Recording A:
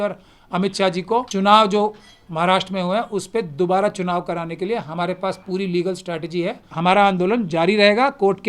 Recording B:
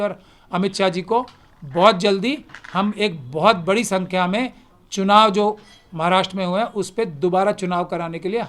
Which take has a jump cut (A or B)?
A